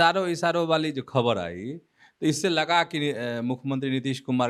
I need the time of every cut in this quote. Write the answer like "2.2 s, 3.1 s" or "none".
none